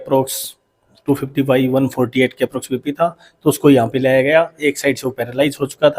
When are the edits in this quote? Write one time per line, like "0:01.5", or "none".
none